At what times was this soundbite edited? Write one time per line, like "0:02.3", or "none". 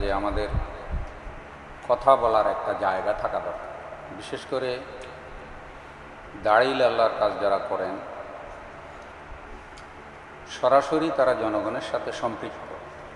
none